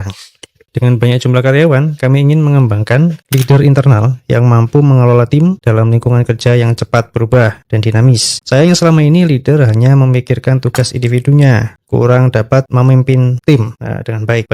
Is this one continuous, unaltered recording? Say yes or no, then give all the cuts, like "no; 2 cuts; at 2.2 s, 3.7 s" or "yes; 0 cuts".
no; 1 cut; at 3.2 s